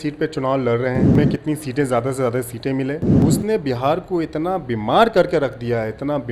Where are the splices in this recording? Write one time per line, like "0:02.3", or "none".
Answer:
0:01.1
0:03.1